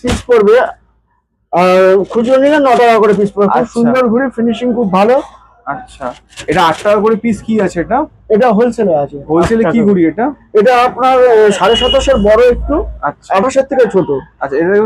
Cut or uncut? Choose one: uncut